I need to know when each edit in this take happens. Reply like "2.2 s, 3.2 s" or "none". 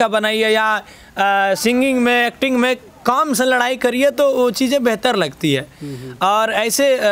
none